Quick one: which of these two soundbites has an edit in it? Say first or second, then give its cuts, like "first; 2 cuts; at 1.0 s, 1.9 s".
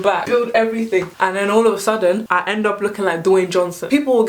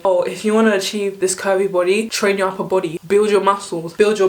second; 1 cut; at 3.0 s